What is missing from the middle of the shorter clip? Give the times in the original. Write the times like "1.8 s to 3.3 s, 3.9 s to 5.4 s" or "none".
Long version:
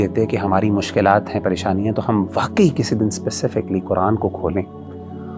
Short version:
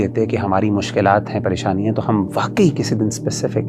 none